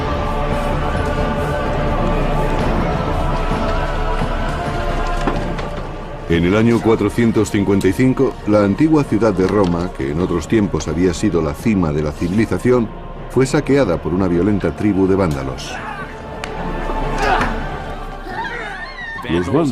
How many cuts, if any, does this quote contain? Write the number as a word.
one